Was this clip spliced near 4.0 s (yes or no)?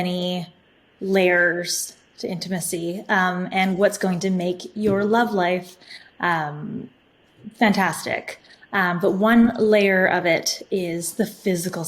no